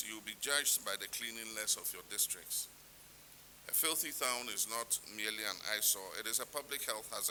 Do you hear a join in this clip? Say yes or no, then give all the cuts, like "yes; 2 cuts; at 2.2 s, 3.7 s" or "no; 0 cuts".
no; 0 cuts